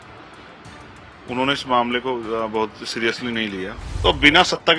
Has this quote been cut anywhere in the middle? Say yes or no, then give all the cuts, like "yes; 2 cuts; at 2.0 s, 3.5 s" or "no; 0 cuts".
yes; 1 cut; at 3.8 s